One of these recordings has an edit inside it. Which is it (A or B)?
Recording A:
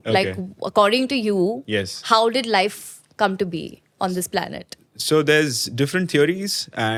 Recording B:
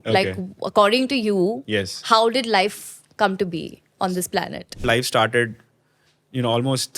B